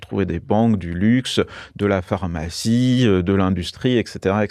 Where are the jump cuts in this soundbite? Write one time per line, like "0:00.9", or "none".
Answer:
none